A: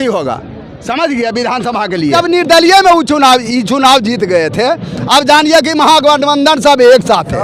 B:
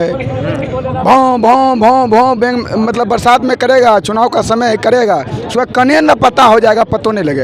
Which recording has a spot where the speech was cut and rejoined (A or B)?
A